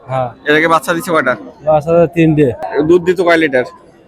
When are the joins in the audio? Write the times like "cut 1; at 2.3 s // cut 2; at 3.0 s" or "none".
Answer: cut 1; at 2.7 s